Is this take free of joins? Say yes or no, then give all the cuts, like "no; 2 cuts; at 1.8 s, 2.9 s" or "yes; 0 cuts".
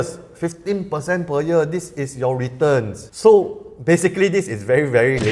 yes; 0 cuts